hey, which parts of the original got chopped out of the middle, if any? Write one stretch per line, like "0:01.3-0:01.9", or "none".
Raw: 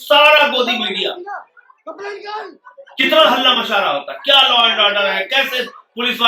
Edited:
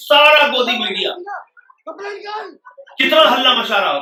none